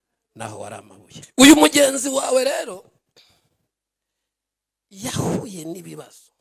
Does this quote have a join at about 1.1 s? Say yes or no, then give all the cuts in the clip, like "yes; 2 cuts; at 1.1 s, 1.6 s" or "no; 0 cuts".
yes; 1 cut; at 1.1 s